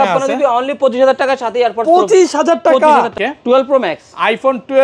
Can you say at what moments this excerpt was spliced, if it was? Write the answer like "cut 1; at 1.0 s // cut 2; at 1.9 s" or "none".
cut 1; at 3.1 s